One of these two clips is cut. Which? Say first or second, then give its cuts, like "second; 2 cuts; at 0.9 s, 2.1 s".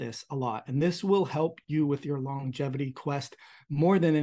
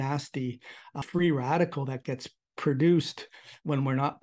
second; 1 cut; at 1.0 s